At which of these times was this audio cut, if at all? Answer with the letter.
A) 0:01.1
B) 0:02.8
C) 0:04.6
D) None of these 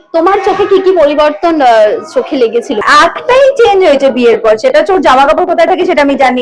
B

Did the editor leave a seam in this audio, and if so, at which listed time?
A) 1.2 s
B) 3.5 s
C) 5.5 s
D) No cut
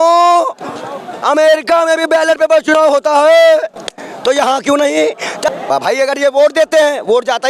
C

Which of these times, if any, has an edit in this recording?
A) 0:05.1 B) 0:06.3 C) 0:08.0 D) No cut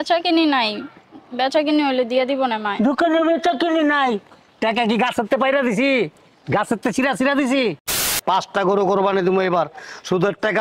C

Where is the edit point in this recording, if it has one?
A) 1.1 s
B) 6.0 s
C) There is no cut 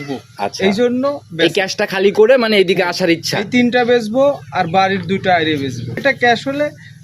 B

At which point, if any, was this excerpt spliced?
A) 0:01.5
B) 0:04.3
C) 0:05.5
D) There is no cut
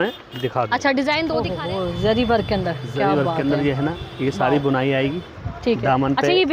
A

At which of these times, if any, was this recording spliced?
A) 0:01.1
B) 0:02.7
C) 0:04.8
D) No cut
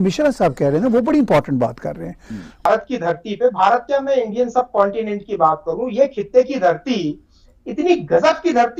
B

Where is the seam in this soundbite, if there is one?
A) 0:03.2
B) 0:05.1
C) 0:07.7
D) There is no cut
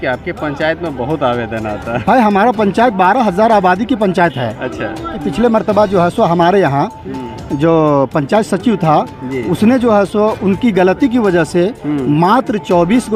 B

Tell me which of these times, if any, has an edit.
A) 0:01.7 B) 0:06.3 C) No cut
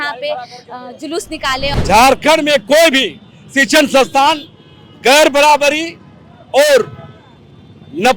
A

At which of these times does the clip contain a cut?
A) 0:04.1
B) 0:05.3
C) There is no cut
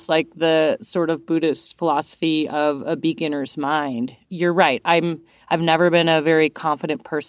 C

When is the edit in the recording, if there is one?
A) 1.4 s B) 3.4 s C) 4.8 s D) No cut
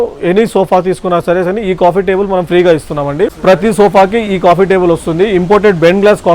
B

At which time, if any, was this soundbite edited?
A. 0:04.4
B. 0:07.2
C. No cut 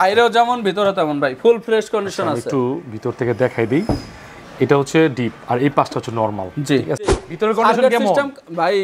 B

